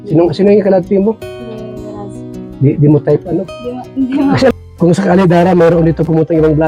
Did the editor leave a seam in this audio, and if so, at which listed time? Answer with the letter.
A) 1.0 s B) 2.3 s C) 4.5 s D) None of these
C